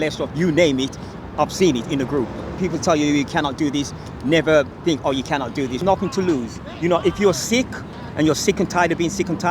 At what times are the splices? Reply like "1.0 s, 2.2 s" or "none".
5.8 s